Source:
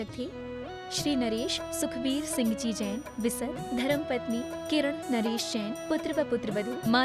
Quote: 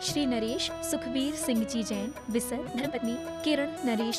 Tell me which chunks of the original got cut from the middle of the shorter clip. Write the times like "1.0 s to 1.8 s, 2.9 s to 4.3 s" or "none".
3.8 s to 4.2 s